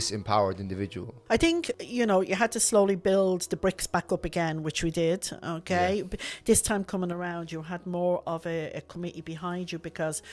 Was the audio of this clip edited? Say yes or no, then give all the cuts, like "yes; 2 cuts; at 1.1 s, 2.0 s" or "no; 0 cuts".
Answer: yes; 2 cuts; at 1.1 s, 1.8 s